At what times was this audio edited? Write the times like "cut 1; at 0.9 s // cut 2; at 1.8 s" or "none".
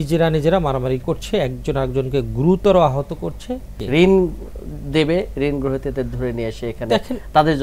cut 1; at 3.7 s